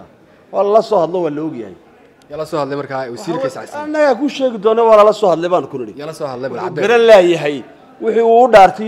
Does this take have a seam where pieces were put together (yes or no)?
no